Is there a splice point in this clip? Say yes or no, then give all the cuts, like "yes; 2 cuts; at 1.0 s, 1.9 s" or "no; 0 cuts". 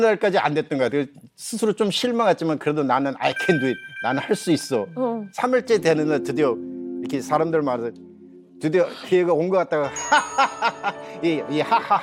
no; 0 cuts